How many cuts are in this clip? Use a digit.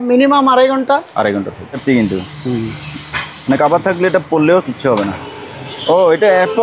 1